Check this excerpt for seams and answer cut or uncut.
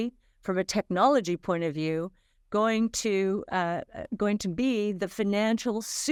uncut